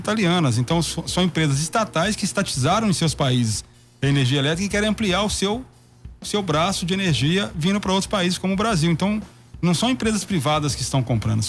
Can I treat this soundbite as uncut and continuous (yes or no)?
yes